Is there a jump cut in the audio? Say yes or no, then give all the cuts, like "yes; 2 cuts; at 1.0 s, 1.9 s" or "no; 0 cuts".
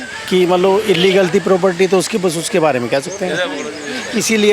no; 0 cuts